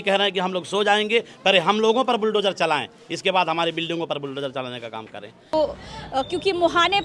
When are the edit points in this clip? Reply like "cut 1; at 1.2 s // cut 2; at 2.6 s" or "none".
cut 1; at 5.5 s

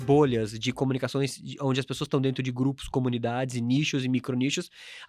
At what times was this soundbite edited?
none

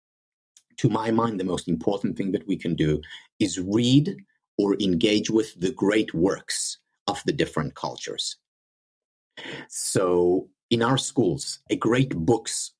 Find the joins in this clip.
cut 1; at 11.6 s

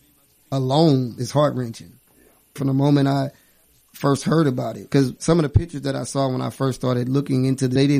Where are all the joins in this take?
cut 1; at 2.6 s

